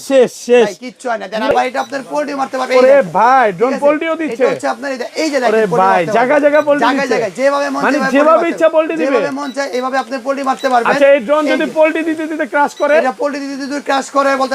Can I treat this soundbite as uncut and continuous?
no; 1 cut; at 1.5 s

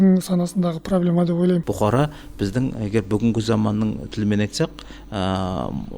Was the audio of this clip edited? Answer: yes; 1 cut; at 1.7 s

